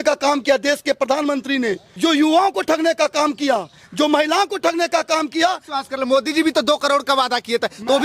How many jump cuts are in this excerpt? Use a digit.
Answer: 2